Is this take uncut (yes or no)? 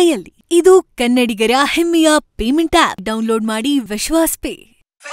yes